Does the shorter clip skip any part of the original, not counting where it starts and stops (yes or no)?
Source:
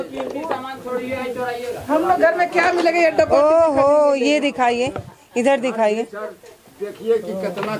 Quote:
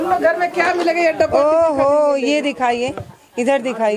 no